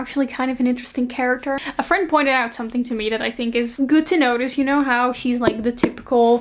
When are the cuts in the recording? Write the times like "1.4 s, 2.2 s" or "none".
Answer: none